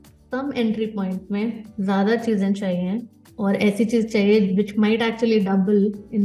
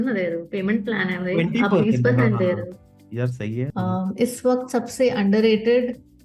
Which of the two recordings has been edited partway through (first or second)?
second